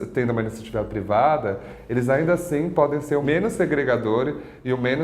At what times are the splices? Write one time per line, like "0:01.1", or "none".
0:03.2